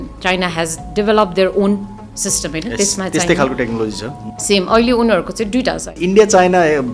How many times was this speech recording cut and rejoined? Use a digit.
1